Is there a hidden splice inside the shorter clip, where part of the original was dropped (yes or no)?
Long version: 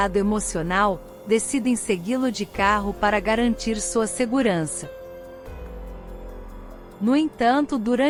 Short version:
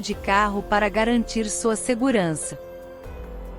yes